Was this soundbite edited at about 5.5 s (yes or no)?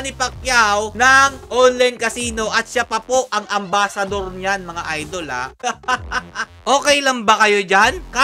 yes